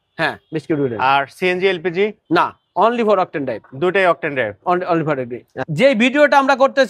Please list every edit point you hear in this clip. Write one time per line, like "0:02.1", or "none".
0:05.6